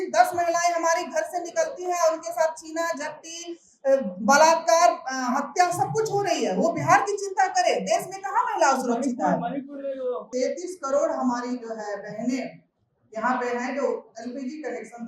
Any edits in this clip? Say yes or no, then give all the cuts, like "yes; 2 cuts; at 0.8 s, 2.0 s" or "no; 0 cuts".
yes; 1 cut; at 10.3 s